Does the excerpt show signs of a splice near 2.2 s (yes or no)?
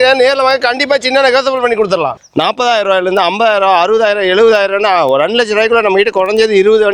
yes